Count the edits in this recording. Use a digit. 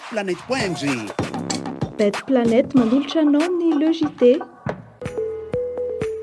1